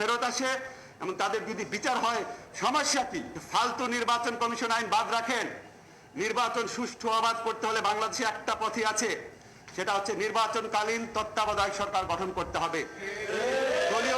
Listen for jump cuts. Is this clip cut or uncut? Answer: cut